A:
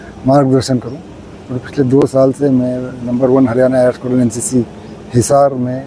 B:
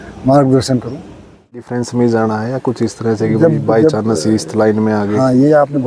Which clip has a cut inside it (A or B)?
B